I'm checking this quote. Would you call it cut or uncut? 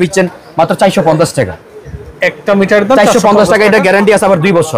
uncut